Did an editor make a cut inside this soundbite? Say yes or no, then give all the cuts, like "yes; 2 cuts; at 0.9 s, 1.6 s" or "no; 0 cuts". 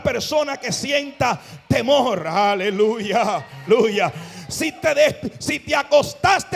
yes; 1 cut; at 3.7 s